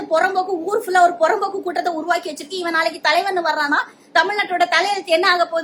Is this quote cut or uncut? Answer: uncut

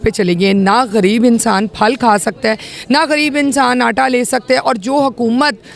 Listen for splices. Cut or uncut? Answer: uncut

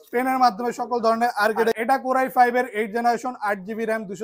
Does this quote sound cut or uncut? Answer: cut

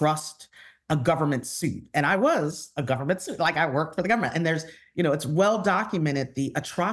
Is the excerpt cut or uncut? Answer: uncut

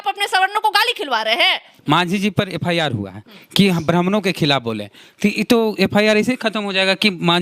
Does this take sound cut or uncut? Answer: cut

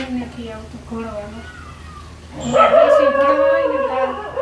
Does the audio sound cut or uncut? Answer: uncut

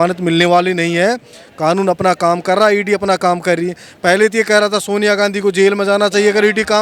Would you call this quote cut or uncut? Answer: uncut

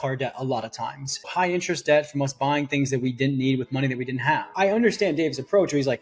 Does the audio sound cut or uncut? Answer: cut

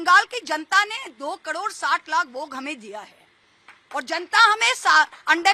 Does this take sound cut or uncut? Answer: uncut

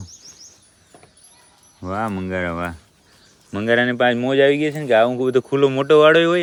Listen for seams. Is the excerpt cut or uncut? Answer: uncut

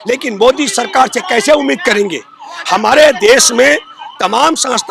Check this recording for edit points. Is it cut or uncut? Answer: uncut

